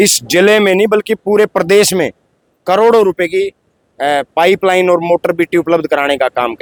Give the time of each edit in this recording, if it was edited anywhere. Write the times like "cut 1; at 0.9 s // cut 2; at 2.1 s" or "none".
none